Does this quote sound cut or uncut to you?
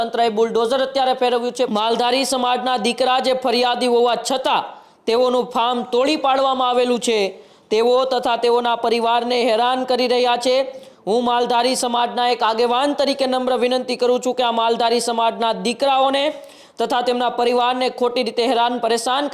cut